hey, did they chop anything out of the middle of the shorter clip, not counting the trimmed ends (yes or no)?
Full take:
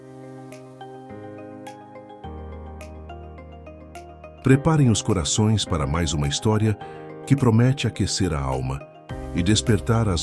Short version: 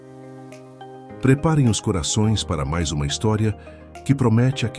yes